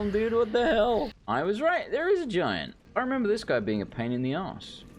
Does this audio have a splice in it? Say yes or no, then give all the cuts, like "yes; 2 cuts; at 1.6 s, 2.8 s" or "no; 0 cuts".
yes; 2 cuts; at 1.2 s, 2.7 s